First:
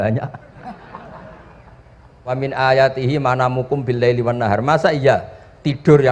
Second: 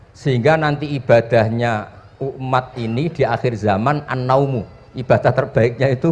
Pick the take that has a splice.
first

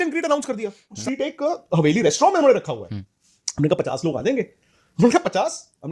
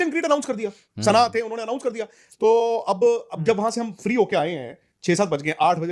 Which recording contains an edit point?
first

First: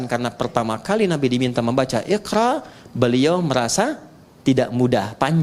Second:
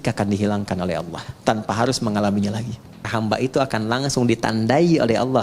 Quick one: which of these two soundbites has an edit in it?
second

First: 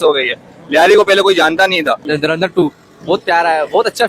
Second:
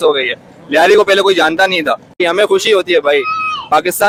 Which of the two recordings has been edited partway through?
first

